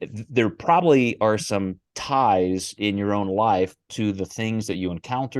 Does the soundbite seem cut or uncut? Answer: cut